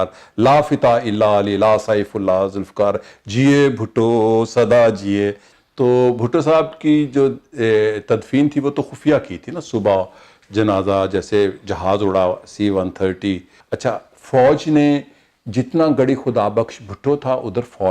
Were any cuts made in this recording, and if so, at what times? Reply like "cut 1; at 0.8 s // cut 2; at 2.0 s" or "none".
cut 1; at 5.4 s // cut 2; at 13.5 s